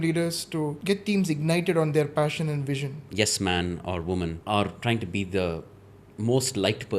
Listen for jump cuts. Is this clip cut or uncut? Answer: cut